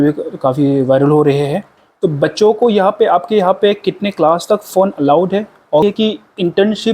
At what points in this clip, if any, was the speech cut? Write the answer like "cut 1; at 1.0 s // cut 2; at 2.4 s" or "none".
cut 1; at 1.8 s // cut 2; at 5.8 s